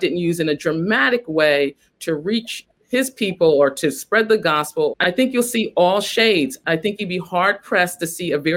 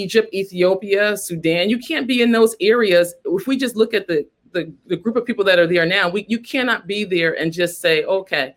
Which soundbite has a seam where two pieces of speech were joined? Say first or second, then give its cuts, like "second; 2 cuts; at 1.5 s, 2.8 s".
first; 3 cuts; at 2.7 s, 4.9 s, 6.6 s